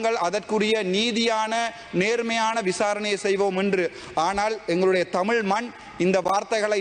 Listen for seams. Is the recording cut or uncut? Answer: uncut